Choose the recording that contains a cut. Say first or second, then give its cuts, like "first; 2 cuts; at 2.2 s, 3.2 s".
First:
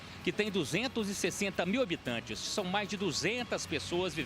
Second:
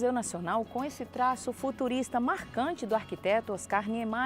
first; 1 cut; at 2.5 s